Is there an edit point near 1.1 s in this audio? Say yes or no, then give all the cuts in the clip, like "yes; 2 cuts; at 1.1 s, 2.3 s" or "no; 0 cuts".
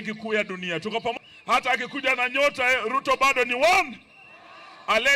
yes; 1 cut; at 1.1 s